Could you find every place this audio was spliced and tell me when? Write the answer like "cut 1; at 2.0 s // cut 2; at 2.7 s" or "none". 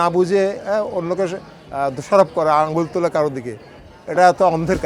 none